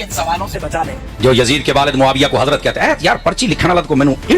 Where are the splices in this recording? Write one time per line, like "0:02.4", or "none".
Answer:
0:01.0